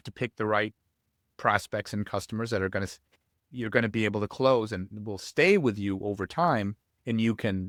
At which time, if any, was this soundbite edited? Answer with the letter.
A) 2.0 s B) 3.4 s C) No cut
C